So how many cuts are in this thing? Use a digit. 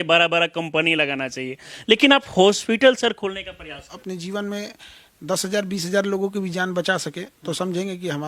1